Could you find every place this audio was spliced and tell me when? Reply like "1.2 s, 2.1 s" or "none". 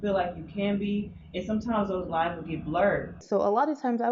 3.2 s